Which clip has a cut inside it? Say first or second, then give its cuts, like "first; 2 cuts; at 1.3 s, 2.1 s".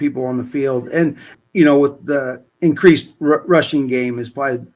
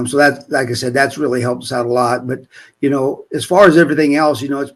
first; 2 cuts; at 1.3 s, 2.4 s